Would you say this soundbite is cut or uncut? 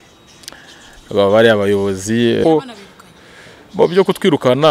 cut